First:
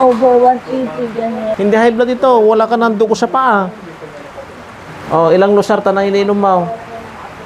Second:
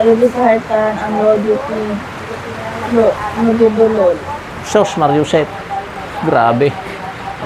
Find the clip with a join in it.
first; 1 cut; at 1.5 s

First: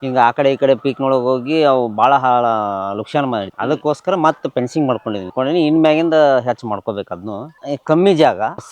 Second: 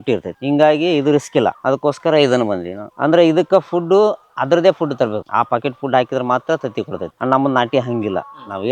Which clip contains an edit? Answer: first; 2 cuts; at 5.3 s, 7.5 s

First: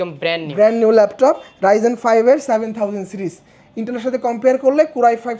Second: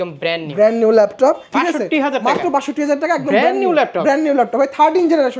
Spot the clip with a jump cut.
second; 1 cut; at 1.5 s

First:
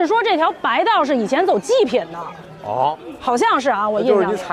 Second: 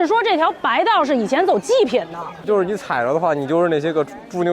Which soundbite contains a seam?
second; 1 cut; at 2.5 s

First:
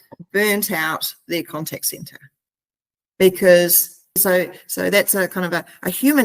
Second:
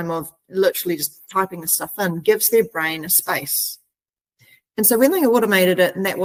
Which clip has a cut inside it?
first; 1 cut; at 4.2 s

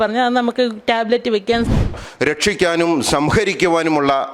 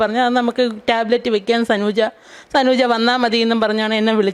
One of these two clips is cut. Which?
first; 1 cut; at 1.8 s

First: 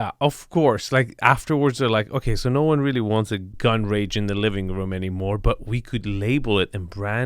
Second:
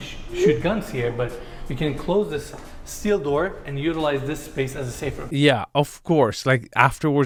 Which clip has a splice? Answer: first; 1 cut; at 3.5 s

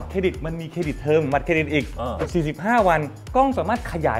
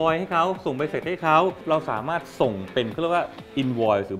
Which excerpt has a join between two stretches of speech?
second; 1 cut; at 1.6 s

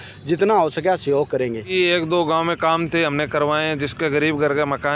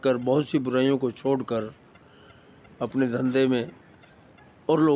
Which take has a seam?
first; 1 cut; at 1.6 s

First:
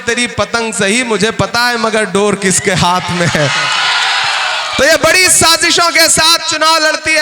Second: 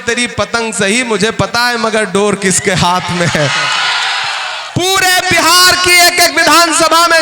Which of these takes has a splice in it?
second; 1 cut; at 4.6 s

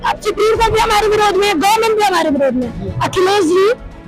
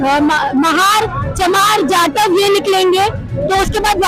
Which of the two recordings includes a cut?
first; 1 cut; at 2.9 s

